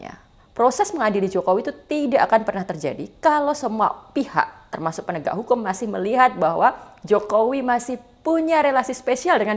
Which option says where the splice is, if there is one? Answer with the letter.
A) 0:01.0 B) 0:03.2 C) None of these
C